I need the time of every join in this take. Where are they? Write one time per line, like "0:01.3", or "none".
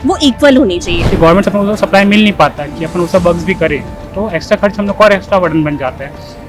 0:00.9